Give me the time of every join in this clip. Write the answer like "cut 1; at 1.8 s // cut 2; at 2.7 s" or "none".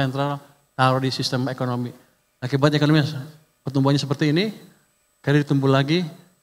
none